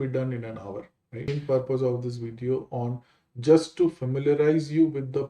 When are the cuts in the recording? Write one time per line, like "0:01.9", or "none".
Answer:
0:01.3